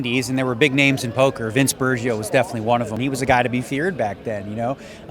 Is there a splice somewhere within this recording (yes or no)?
yes